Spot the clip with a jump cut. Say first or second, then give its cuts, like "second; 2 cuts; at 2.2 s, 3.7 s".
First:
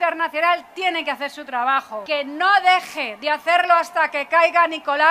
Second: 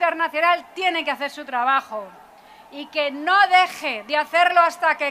first; 1 cut; at 2.0 s